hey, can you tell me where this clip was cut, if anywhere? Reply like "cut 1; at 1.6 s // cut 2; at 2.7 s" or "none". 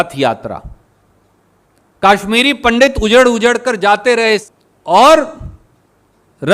cut 1; at 4.6 s